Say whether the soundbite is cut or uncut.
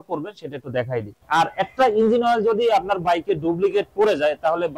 cut